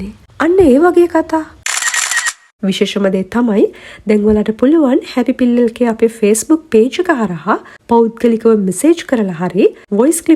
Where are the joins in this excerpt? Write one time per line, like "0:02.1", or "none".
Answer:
0:01.9